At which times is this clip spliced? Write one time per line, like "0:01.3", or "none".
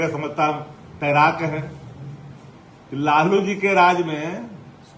none